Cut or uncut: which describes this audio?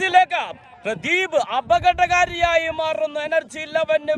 uncut